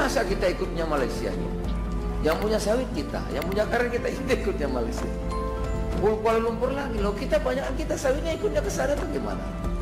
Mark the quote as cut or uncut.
uncut